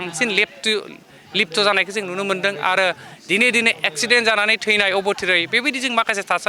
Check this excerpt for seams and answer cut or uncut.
uncut